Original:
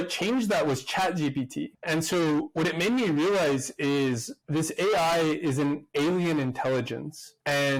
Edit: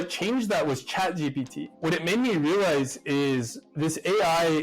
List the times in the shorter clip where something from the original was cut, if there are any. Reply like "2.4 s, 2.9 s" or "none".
1.8 s